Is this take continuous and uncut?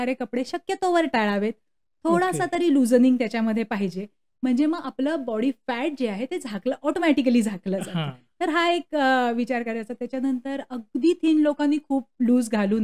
yes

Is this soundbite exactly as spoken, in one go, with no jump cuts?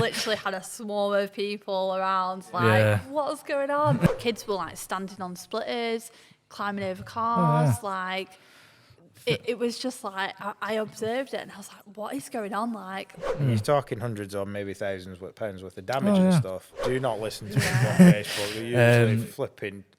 no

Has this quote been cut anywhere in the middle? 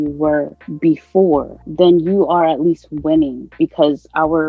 yes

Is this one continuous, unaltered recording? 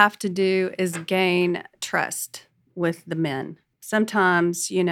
no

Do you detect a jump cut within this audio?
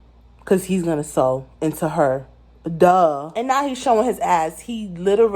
yes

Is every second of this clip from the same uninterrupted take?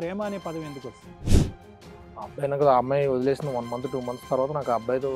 yes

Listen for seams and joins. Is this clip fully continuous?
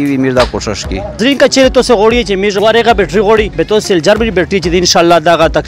no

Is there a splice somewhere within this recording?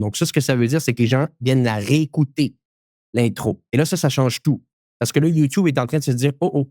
no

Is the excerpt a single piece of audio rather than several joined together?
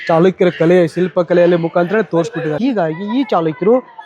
no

